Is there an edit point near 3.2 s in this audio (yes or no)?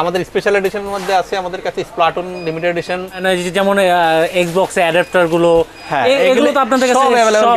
yes